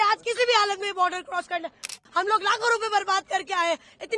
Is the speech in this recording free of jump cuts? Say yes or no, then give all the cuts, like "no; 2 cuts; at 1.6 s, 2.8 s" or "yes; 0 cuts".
no; 1 cut; at 1.9 s